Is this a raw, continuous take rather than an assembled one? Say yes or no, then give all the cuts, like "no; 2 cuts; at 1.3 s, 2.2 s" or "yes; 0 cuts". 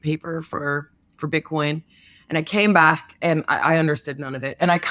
yes; 0 cuts